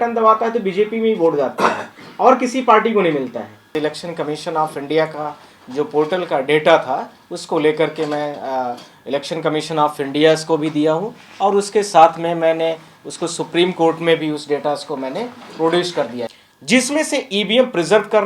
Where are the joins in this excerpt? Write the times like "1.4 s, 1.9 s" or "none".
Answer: 3.6 s, 16.3 s

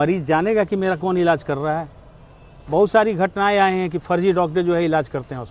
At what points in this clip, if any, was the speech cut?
none

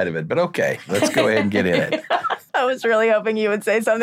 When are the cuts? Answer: 2.4 s

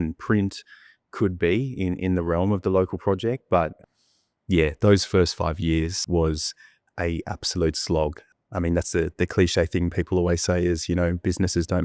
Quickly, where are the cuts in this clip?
3.8 s, 6.0 s, 8.2 s

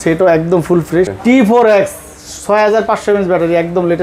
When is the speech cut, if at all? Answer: 1.1 s

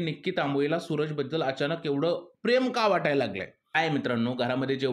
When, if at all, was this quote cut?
none

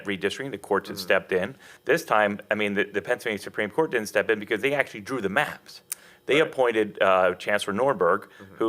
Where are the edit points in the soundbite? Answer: 1.7 s

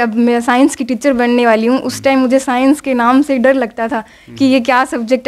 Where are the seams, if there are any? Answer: none

